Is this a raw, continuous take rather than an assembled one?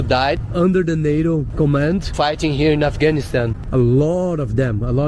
yes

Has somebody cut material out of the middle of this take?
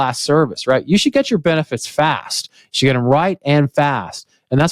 no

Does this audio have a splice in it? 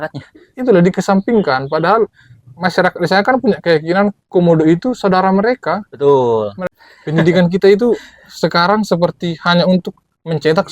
yes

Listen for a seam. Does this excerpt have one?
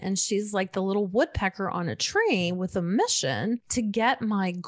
yes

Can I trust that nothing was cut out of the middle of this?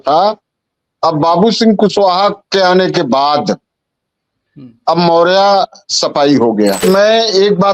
no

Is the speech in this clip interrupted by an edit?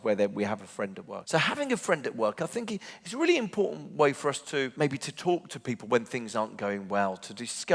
yes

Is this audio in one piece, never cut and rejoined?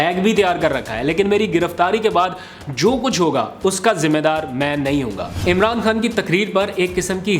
no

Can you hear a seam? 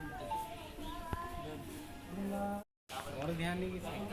yes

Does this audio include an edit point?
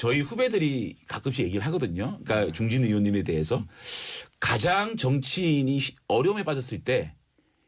yes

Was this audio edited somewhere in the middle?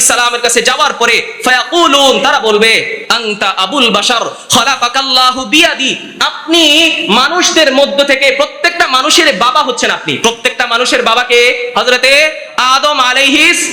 no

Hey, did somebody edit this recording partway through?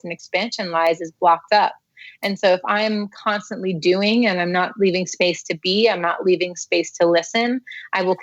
no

